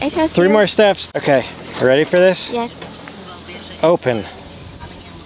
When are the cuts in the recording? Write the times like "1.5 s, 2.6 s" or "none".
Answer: 1.0 s